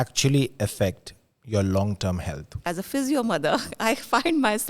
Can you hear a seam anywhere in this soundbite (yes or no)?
yes